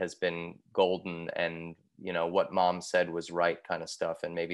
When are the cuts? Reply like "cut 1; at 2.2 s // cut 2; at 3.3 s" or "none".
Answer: none